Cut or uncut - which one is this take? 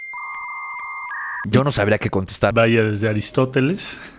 cut